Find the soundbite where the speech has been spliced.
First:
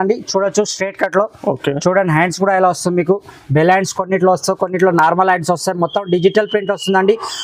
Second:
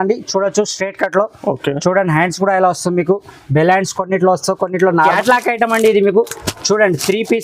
second; 1 cut; at 5.0 s

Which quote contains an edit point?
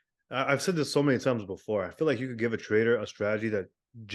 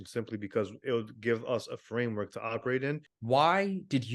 second; 1 cut; at 3.1 s

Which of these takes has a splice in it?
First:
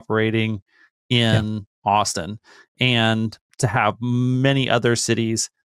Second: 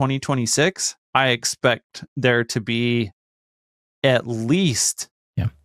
second; 1 cut; at 0.9 s

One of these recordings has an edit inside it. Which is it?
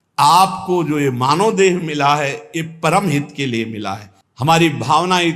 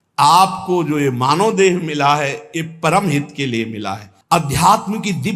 first; 1 cut; at 4.1 s

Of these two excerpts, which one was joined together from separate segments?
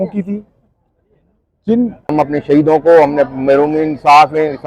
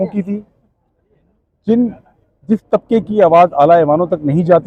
first; 1 cut; at 2.1 s

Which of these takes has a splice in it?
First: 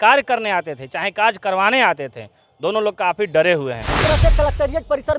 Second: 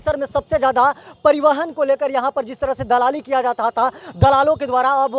first; 1 cut; at 4.0 s

